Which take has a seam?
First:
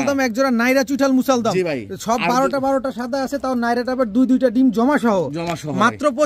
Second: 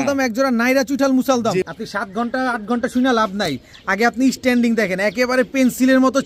second; 1 cut; at 1.7 s

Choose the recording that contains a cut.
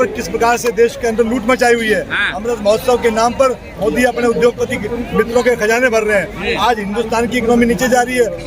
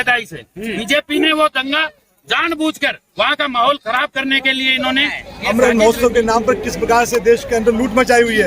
second; 1 cut; at 5.3 s

